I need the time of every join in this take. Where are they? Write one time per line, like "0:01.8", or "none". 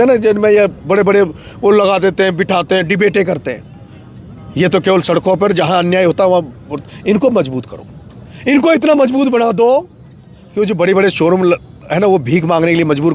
none